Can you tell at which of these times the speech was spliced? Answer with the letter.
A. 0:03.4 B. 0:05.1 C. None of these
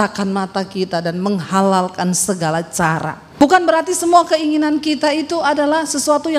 A